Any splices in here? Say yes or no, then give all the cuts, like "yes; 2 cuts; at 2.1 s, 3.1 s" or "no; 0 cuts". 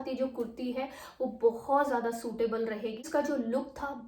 yes; 1 cut; at 3.0 s